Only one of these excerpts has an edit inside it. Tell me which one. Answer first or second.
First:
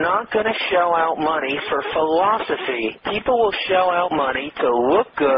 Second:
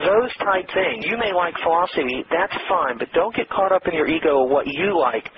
second